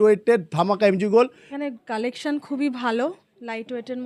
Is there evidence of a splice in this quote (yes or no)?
yes